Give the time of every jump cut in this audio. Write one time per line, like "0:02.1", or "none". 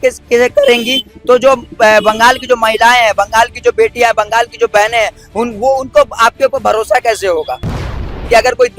0:07.9